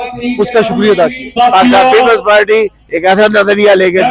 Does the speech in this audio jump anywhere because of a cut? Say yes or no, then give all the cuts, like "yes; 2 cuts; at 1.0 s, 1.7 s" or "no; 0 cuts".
yes; 1 cut; at 1.3 s